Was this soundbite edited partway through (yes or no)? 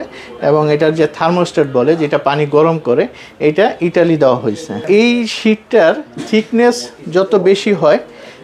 yes